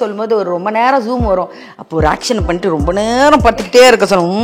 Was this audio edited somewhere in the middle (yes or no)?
no